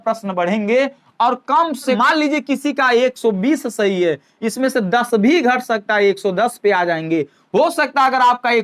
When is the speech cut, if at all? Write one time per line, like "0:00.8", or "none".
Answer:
0:02.0